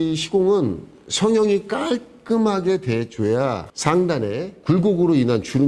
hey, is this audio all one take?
yes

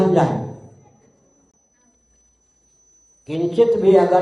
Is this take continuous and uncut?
yes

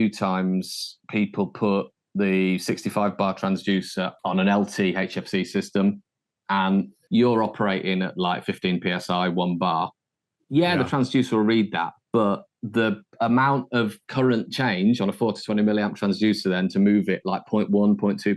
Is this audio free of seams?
no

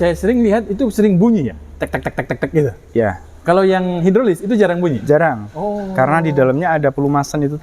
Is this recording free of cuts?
yes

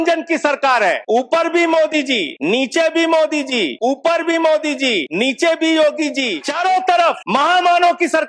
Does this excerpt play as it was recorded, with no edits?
no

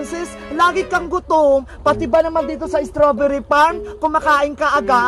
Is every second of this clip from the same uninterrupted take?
yes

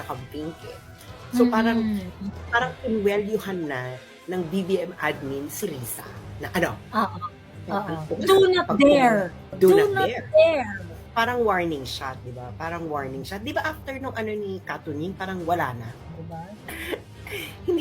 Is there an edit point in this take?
yes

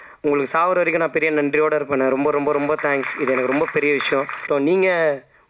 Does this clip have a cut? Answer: yes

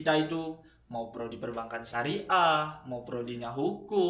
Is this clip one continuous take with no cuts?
yes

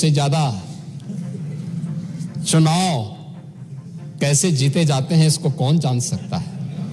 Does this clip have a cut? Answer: no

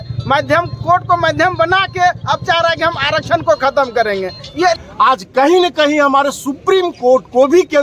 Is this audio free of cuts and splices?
no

